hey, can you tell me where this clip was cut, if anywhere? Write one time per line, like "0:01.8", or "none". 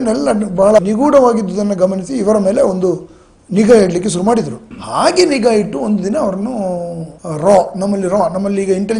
none